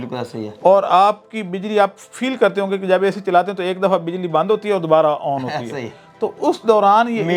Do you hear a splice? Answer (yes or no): no